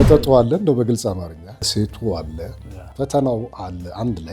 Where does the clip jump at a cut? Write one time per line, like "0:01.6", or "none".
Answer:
0:01.7